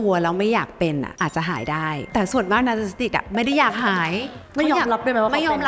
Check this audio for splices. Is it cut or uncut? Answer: uncut